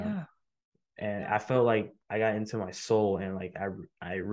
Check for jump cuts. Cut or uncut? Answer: cut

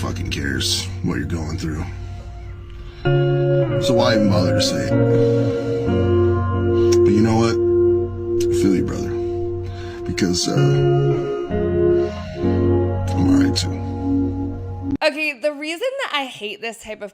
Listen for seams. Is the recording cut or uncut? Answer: uncut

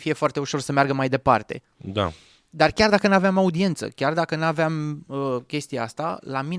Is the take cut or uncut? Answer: uncut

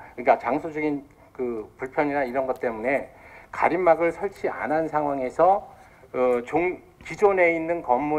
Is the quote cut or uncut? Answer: cut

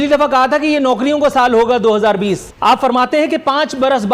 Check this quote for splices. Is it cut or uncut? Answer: cut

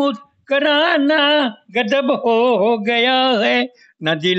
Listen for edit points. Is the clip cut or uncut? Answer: uncut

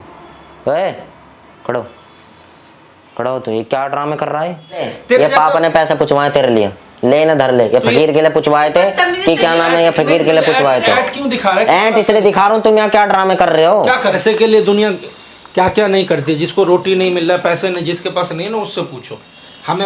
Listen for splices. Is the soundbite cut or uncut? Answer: cut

